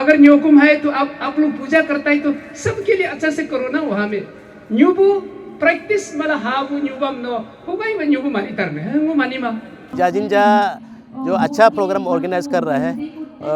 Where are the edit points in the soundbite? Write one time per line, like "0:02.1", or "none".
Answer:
none